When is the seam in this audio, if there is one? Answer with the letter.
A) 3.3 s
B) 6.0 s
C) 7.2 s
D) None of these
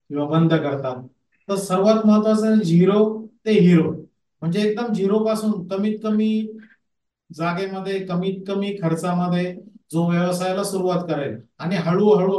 D